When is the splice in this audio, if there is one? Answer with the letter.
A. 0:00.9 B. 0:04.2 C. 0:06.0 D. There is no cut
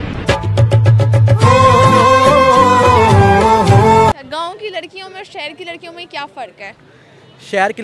B